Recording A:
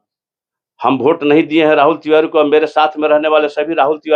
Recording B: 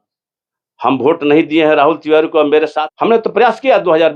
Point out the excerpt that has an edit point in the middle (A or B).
B